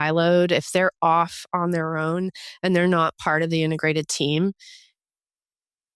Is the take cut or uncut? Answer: uncut